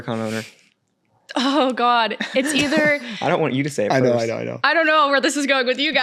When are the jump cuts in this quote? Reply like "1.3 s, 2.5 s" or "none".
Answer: none